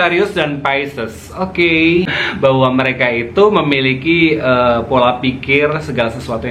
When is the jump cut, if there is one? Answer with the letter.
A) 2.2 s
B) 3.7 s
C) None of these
A